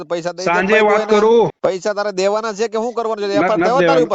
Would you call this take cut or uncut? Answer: cut